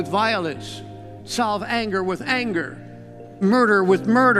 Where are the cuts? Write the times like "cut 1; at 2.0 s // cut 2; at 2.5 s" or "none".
cut 1; at 3.4 s